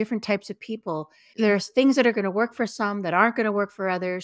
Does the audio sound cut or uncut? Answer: cut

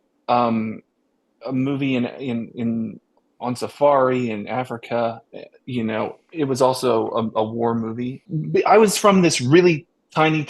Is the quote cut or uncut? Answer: cut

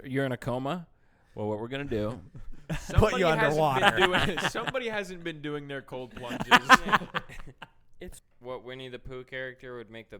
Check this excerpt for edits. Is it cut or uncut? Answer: cut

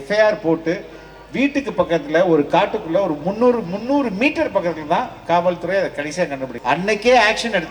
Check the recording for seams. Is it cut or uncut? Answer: cut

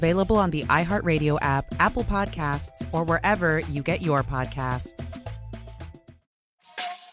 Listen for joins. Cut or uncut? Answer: cut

